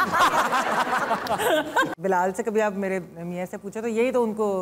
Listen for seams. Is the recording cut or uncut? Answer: cut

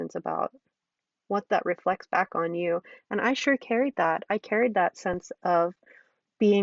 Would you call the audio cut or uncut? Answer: uncut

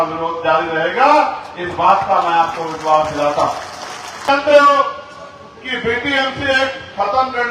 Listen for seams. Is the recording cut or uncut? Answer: cut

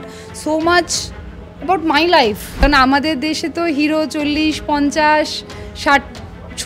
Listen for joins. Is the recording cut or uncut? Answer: cut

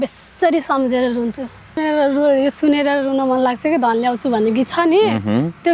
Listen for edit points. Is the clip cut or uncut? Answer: cut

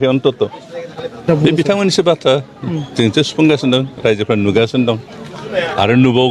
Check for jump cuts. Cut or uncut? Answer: cut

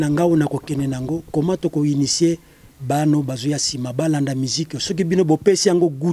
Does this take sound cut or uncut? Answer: uncut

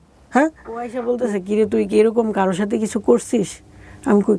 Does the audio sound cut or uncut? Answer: cut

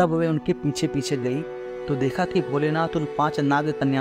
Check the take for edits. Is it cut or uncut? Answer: uncut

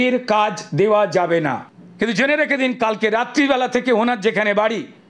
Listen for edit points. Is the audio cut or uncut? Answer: cut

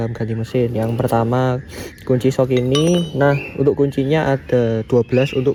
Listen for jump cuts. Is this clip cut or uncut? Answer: uncut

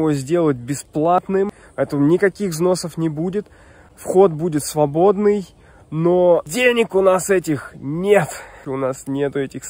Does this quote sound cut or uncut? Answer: cut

